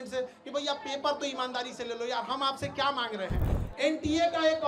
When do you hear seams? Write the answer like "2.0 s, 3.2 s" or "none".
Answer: 3.6 s